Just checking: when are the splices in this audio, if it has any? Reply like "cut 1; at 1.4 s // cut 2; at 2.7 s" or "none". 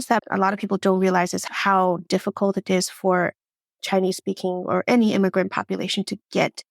cut 1; at 1.5 s

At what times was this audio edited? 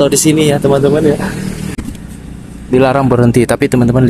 cut 1; at 1.7 s

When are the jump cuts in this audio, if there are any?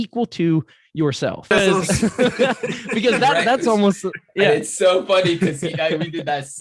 cut 1; at 1.5 s

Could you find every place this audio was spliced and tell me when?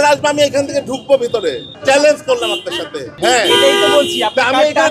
cut 1; at 1.7 s // cut 2; at 3.1 s

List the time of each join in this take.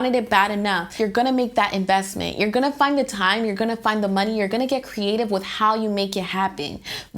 cut 1; at 0.9 s

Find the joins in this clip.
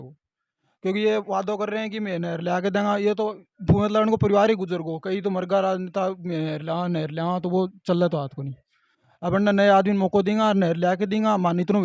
none

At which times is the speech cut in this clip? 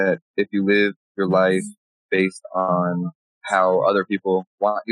cut 1; at 1.0 s // cut 2; at 2.7 s

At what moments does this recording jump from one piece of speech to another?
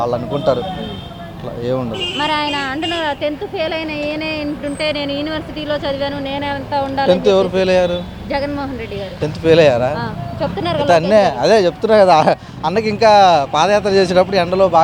none

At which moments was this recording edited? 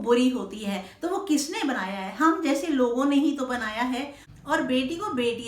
cut 1; at 4.2 s

